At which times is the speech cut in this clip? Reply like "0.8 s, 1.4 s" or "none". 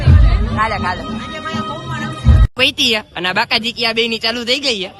2.5 s